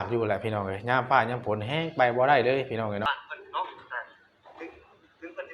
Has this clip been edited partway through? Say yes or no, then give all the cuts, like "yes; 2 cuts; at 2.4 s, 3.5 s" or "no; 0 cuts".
yes; 1 cut; at 3.1 s